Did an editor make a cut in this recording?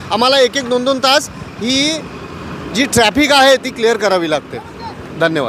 no; 0 cuts

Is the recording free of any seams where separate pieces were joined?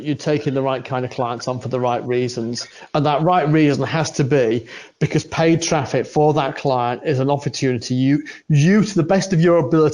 yes; 0 cuts

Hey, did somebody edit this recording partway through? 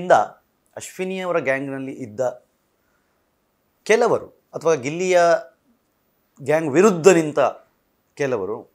no; 0 cuts

